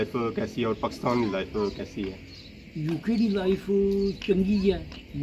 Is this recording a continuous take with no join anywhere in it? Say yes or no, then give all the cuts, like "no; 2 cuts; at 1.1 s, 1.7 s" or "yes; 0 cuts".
yes; 0 cuts